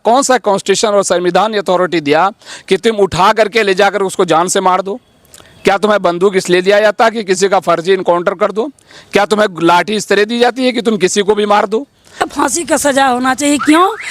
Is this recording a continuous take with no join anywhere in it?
no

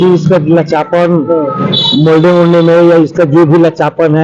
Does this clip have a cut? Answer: no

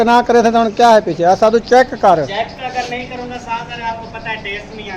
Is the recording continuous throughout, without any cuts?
yes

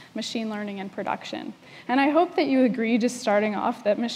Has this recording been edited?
yes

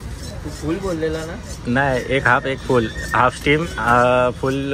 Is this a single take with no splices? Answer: yes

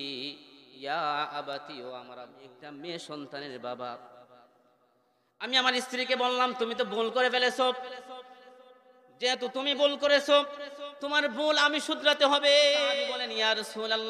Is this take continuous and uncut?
no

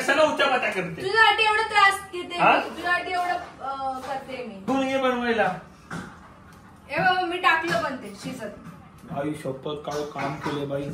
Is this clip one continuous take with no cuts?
no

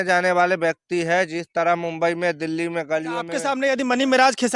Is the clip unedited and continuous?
no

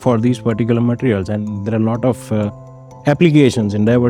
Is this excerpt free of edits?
yes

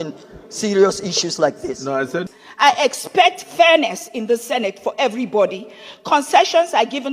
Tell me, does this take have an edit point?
yes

